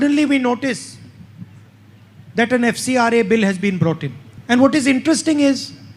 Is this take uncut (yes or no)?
yes